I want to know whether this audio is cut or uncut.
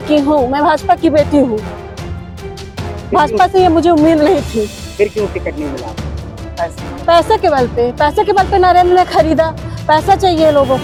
uncut